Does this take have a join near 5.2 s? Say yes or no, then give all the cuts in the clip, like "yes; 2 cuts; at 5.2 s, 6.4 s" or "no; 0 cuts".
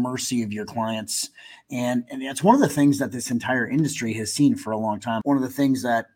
yes; 1 cut; at 5.2 s